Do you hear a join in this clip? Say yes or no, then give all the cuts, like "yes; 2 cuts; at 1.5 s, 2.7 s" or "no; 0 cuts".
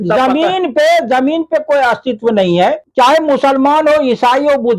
yes; 1 cut; at 2.8 s